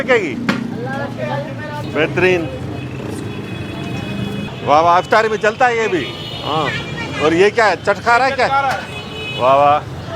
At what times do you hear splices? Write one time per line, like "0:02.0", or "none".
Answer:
0:01.9
0:04.5